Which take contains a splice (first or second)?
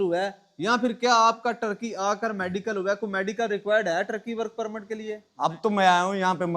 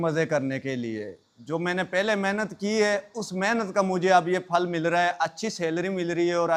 first